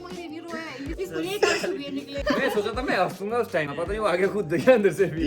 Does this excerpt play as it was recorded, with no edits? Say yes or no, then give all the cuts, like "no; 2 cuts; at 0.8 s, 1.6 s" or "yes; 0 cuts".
no; 3 cuts; at 0.9 s, 2.1 s, 3.7 s